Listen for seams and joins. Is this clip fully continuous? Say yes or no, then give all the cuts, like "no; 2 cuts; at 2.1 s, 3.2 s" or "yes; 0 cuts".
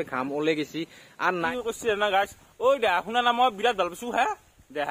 no; 1 cut; at 1.4 s